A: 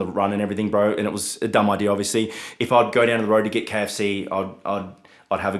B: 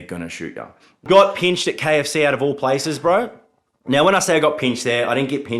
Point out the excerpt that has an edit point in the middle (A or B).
B